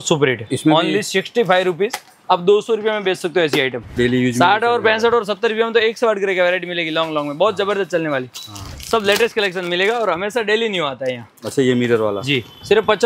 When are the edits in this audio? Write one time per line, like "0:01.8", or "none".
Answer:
0:03.9
0:08.8